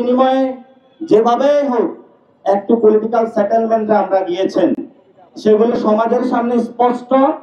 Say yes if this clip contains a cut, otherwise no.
no